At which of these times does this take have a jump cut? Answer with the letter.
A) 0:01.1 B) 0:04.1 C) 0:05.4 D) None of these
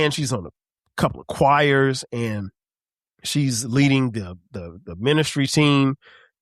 D